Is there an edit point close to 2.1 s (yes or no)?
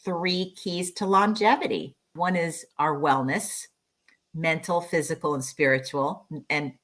yes